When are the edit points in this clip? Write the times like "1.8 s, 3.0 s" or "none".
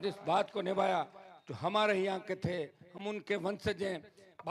none